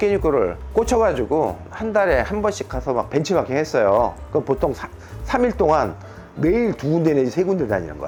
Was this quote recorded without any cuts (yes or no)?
yes